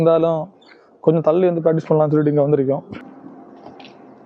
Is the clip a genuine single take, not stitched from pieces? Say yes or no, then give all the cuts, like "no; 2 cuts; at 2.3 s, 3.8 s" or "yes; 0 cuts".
no; 1 cut; at 2.9 s